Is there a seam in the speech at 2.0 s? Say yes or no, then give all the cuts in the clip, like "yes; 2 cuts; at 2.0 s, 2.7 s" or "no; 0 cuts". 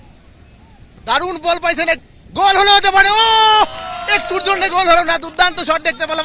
yes; 1 cut; at 2.0 s